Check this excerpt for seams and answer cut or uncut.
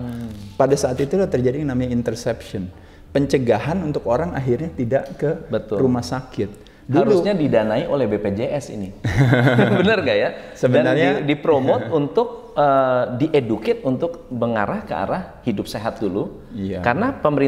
uncut